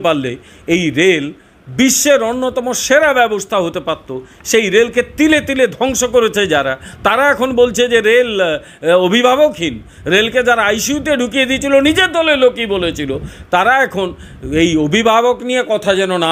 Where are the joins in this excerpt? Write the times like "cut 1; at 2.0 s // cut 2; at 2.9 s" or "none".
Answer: none